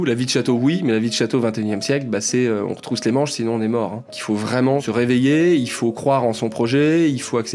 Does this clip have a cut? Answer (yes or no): yes